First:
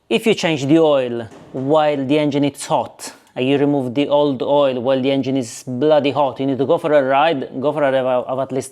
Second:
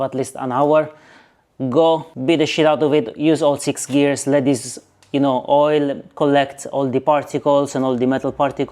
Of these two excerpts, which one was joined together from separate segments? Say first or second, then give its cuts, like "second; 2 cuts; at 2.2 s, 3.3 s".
second; 1 cut; at 2.1 s